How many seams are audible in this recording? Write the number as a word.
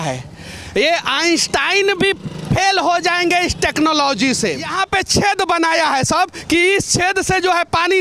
one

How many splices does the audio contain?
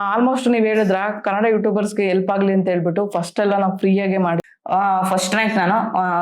one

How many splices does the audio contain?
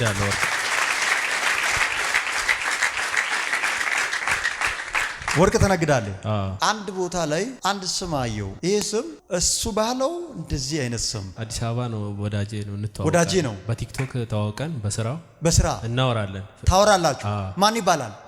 one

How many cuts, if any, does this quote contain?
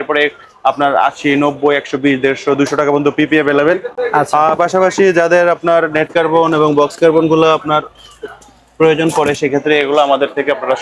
zero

